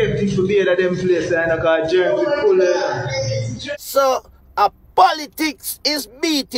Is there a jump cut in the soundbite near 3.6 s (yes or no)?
yes